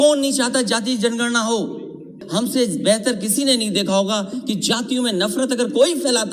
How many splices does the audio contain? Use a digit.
1